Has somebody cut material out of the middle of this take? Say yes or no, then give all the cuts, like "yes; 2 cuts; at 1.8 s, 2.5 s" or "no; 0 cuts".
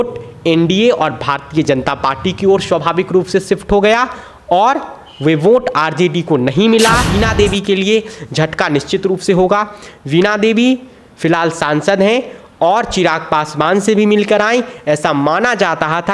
yes; 1 cut; at 7.0 s